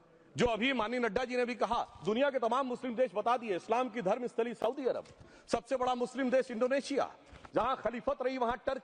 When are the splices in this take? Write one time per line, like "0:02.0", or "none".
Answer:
none